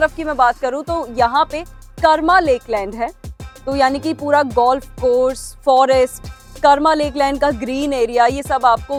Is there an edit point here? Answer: no; 0 cuts

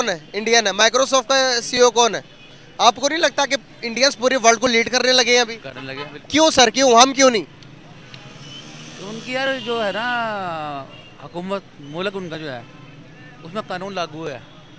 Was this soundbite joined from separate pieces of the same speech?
no; 0 cuts

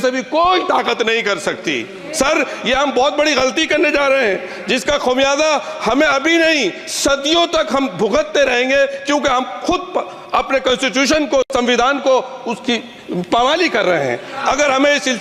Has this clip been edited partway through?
no; 0 cuts

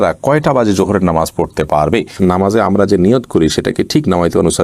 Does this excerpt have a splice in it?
yes; 1 cut; at 2.1 s

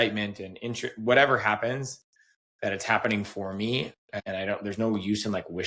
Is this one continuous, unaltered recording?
no; 1 cut; at 4.1 s

